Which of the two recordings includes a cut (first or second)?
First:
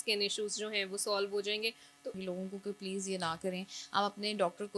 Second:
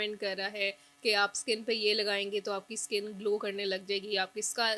first